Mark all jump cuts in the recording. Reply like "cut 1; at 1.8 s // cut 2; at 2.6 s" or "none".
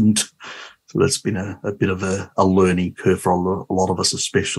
none